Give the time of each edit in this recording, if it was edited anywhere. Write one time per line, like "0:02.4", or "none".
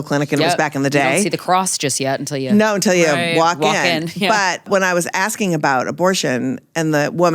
0:04.7